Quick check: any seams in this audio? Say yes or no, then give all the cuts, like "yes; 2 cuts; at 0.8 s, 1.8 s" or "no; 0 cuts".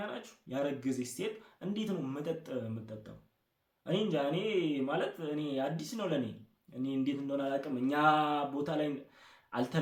no; 0 cuts